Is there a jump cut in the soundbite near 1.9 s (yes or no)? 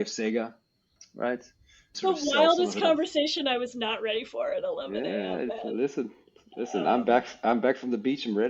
yes